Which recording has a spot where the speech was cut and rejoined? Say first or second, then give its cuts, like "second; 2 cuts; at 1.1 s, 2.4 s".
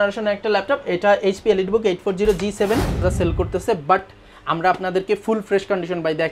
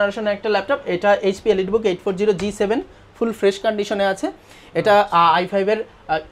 first; 1 cut; at 3.0 s